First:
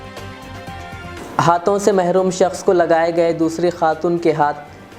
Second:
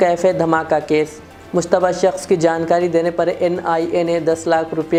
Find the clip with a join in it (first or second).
first